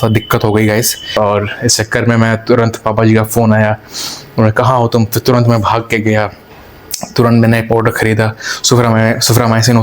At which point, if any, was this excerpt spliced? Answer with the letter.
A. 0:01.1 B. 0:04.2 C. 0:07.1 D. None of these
A